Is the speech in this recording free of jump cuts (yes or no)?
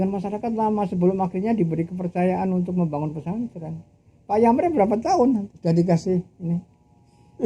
yes